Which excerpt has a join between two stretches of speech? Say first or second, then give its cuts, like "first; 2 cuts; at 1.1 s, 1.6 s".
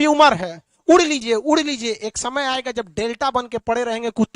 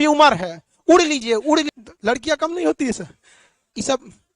second; 1 cut; at 1.7 s